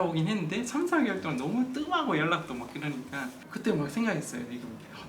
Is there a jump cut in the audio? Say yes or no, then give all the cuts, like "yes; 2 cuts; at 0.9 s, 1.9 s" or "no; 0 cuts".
yes; 1 cut; at 3.4 s